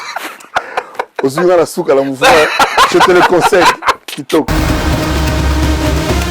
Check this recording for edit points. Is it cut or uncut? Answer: cut